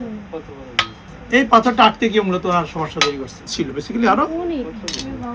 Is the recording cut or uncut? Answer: cut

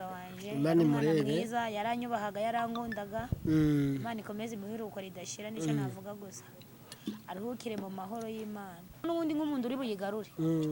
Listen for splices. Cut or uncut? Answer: cut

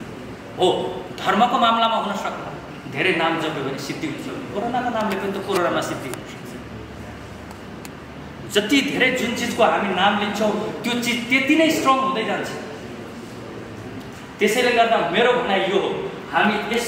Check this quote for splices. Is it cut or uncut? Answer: uncut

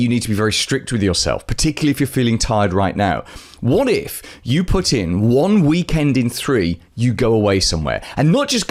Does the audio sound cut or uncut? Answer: uncut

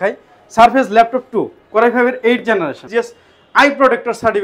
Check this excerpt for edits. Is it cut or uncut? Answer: cut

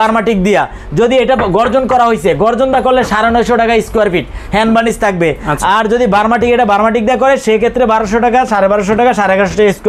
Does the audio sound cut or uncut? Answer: uncut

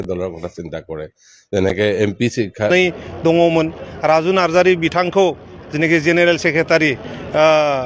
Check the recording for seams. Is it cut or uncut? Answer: cut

